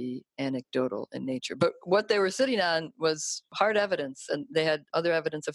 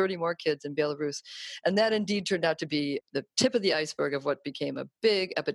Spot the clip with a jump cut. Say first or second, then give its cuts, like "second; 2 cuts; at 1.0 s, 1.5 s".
first; 1 cut; at 3.4 s